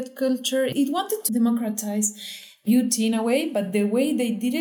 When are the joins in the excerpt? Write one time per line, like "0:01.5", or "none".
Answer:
0:00.8
0:02.6